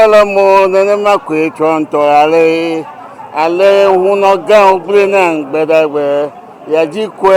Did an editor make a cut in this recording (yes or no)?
no